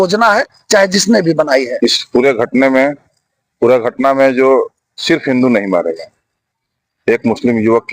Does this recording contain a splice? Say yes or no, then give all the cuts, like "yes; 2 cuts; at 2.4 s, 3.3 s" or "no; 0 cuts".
yes; 1 cut; at 1.7 s